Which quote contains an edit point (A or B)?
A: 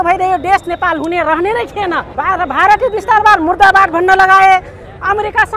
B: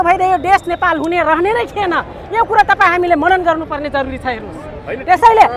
A